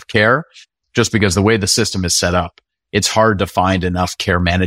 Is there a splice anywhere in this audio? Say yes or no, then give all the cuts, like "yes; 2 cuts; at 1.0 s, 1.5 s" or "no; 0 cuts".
no; 0 cuts